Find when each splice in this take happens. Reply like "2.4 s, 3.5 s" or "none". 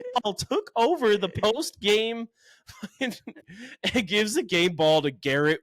3.4 s